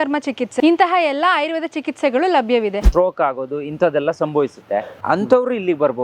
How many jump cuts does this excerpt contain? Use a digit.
2